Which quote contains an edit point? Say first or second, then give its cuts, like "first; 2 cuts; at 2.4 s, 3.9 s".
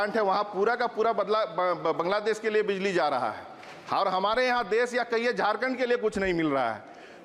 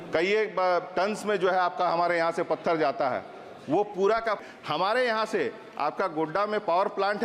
second; 1 cut; at 4.4 s